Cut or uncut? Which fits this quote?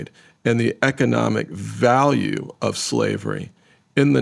uncut